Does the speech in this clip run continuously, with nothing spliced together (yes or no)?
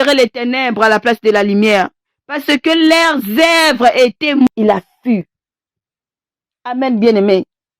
no